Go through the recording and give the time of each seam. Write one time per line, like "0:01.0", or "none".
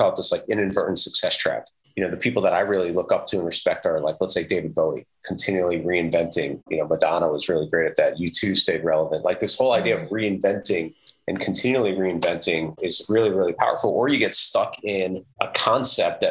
none

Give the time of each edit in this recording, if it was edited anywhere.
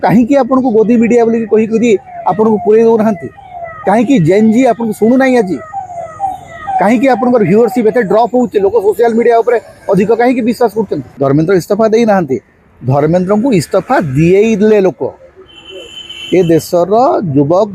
0:11.0

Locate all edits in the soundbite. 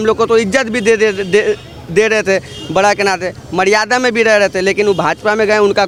none

